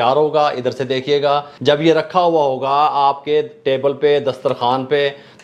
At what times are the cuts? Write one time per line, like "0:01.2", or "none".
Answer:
0:01.5